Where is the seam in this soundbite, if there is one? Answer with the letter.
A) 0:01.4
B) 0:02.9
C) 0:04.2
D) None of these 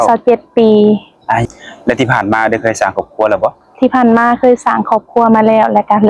A